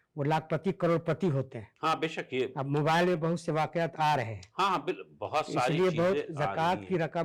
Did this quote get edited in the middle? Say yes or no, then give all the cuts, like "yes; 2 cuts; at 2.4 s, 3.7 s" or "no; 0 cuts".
no; 0 cuts